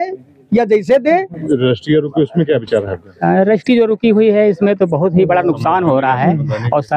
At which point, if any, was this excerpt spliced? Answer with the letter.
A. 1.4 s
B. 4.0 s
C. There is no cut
A